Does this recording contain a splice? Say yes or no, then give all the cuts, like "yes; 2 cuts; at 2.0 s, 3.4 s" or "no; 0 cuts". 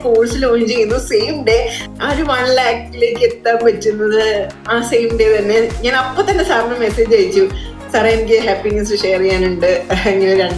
yes; 1 cut; at 1.9 s